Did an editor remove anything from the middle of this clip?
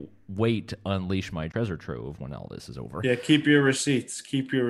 yes; 2 cuts; at 1.5 s, 3.0 s

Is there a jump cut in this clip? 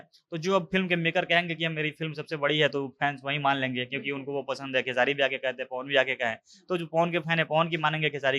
no; 0 cuts

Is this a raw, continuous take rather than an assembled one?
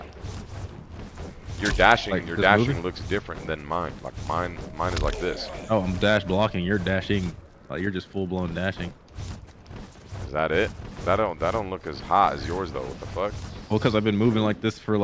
yes; 0 cuts

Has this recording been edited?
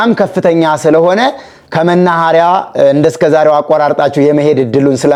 no; 0 cuts

